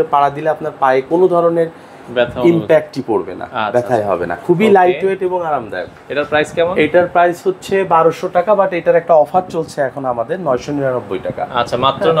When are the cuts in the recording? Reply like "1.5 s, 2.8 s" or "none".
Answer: none